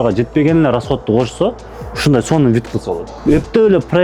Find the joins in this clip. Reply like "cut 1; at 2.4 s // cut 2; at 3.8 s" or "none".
cut 1; at 3.1 s